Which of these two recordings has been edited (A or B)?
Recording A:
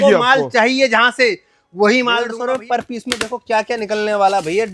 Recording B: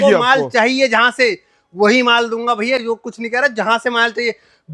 A